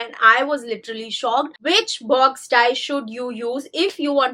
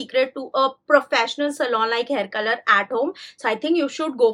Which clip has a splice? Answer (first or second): first